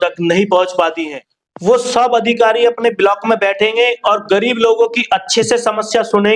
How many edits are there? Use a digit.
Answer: 1